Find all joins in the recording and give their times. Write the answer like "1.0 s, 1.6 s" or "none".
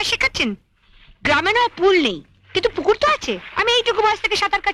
none